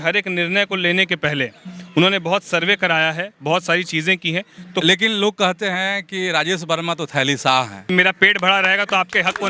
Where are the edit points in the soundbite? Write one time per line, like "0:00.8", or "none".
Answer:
0:04.8
0:07.9